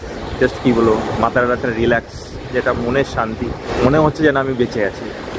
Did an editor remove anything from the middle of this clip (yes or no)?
yes